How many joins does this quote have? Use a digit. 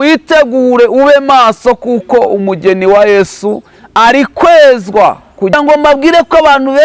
1